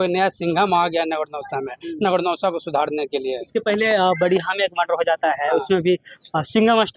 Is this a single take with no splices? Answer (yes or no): yes